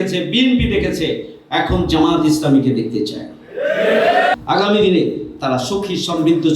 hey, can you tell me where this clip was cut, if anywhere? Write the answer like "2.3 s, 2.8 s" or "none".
4.3 s